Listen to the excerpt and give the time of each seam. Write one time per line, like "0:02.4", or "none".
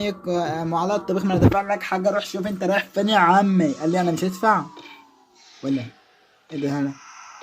none